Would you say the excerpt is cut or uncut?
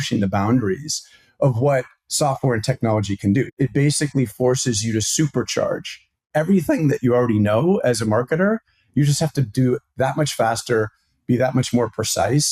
cut